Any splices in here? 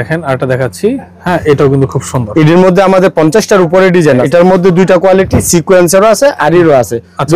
yes; 1 cut; at 4.2 s

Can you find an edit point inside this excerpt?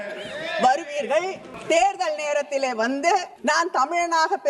yes; 2 cuts; at 1.5 s, 3.3 s

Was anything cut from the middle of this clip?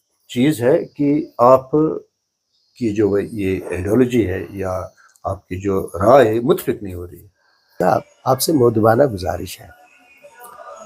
yes; 1 cut; at 7.7 s

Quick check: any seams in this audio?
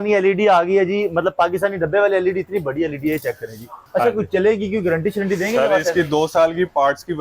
yes; 1 cut; at 3.8 s

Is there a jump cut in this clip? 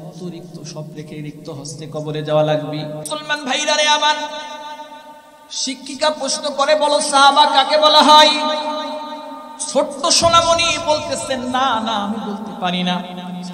yes; 1 cut; at 3.2 s

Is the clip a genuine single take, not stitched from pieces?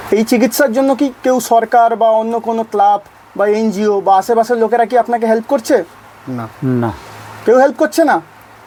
yes; 0 cuts

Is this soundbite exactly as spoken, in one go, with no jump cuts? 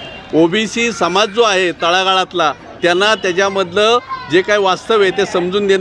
yes; 0 cuts

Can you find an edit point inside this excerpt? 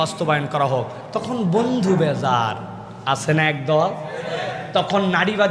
no; 0 cuts

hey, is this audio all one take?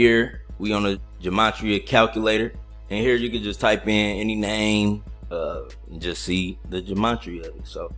no; 1 cut; at 1.0 s

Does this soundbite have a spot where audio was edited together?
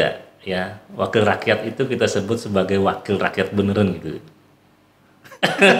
no; 0 cuts

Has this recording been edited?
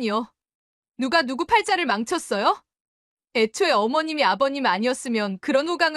no; 0 cuts

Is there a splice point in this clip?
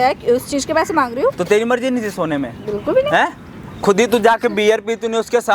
no; 0 cuts

